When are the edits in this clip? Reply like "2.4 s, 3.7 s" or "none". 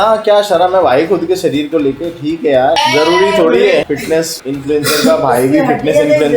2.8 s, 4.0 s